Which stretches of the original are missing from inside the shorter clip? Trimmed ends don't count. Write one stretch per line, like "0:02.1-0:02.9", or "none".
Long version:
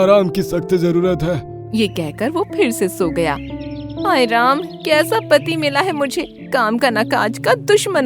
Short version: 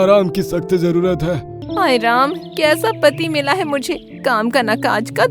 0:01.5-0:03.8